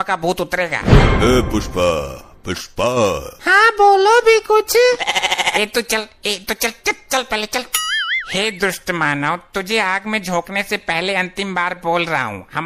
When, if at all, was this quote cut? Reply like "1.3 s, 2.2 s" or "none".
none